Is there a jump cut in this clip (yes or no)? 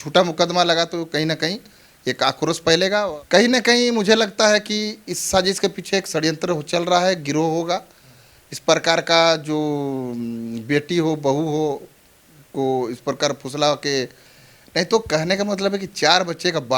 yes